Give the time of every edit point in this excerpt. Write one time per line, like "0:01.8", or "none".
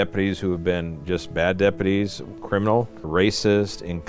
0:03.0